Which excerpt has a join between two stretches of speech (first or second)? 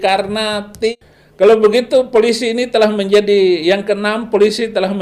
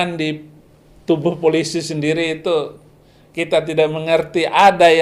first